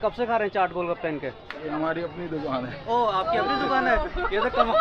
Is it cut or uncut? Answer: uncut